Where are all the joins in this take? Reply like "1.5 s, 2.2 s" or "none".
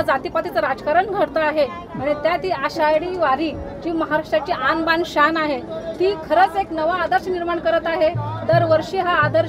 none

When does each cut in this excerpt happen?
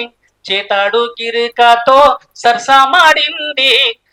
none

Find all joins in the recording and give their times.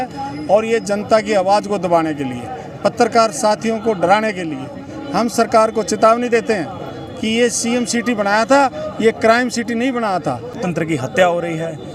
10.6 s

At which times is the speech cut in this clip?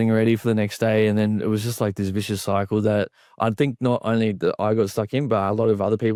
none

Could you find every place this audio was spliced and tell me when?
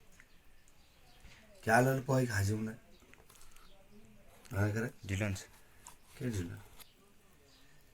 1.1 s, 6.9 s

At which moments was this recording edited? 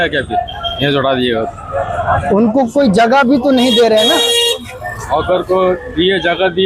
none

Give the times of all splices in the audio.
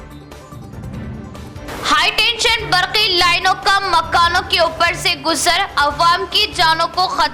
1.0 s

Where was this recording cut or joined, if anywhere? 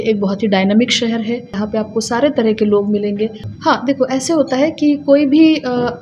1.6 s, 3.4 s

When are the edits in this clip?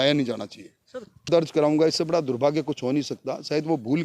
1.3 s

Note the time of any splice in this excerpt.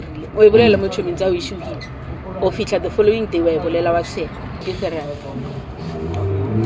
4.7 s

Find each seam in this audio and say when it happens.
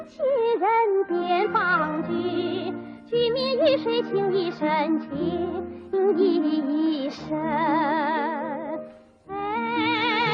7.2 s

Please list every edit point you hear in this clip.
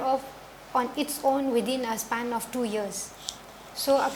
none

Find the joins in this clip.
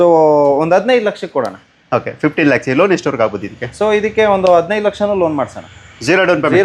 none

